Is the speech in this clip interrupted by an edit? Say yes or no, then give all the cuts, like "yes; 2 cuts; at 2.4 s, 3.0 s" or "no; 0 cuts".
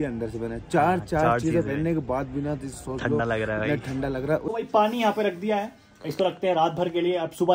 yes; 1 cut; at 4.5 s